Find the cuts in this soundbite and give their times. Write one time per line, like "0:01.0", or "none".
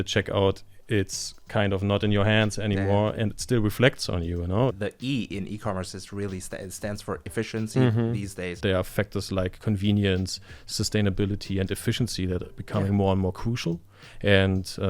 0:04.8
0:08.6